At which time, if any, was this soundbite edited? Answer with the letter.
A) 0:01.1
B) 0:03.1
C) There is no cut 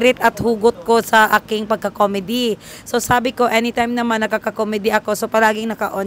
C